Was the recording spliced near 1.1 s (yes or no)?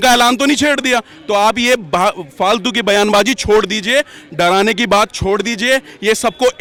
no